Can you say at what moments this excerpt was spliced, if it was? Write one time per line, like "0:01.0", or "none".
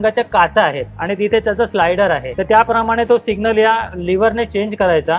0:02.3